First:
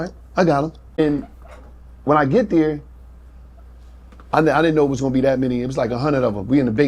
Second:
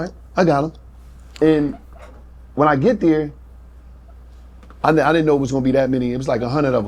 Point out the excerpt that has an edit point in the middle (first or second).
first